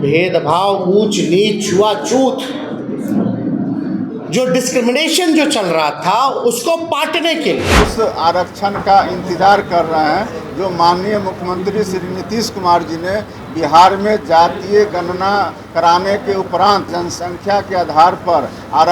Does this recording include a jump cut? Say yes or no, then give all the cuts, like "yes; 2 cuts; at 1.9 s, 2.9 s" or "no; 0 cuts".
yes; 2 cuts; at 7.8 s, 16.9 s